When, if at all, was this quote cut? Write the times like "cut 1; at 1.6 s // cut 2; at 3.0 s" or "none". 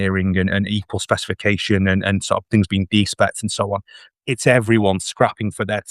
none

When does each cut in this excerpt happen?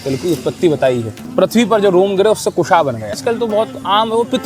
cut 1; at 1.2 s // cut 2; at 3.2 s

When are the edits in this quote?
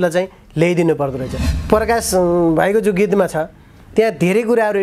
cut 1; at 1.4 s

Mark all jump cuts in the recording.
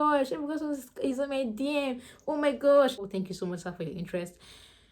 cut 1; at 3.1 s

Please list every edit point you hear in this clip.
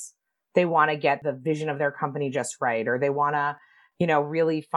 cut 1; at 1.2 s

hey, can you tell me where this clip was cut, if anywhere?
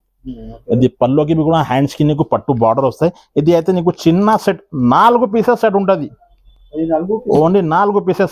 none

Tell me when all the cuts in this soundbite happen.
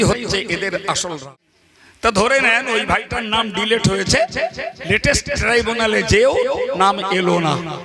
cut 1; at 1.2 s

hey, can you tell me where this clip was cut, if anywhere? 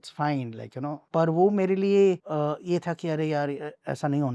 cut 1; at 1.0 s // cut 2; at 2.2 s

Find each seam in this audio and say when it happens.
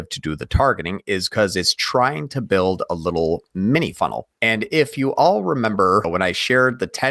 cut 1; at 4.3 s // cut 2; at 6.1 s

